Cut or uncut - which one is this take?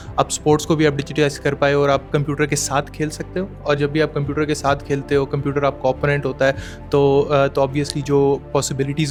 uncut